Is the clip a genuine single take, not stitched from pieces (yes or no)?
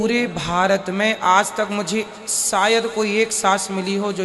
yes